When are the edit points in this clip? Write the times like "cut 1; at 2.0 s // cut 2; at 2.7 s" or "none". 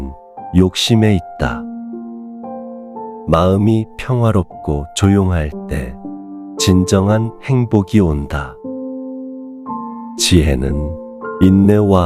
none